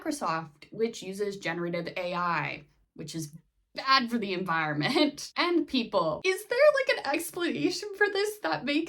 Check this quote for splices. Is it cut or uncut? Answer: cut